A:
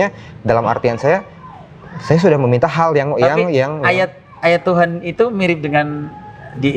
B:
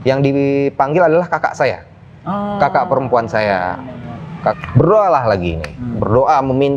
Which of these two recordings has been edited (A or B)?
B